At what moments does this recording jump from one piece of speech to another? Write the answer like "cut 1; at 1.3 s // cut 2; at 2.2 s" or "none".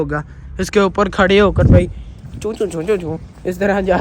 none